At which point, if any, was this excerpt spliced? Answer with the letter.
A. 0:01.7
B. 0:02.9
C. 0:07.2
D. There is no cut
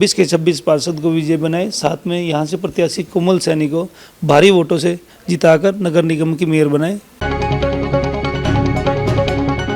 C